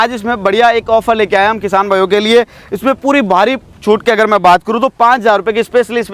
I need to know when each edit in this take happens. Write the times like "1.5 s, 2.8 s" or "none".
none